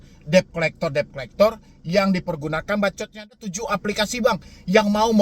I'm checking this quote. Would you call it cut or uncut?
cut